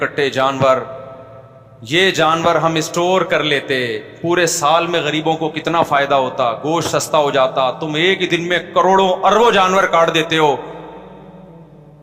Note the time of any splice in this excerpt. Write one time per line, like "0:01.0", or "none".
none